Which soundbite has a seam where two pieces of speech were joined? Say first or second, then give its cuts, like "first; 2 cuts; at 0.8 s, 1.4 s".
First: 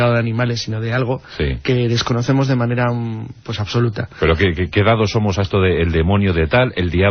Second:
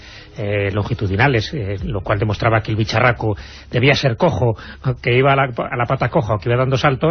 first; 1 cut; at 2.7 s